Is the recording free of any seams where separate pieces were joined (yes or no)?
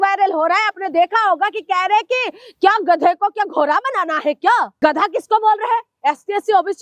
no